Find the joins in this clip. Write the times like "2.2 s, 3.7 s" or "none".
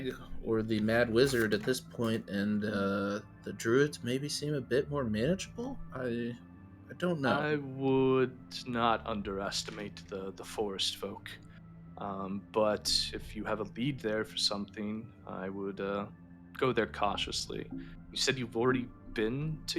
none